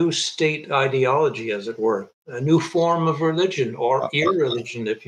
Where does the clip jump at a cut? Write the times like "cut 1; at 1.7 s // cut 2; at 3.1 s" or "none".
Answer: none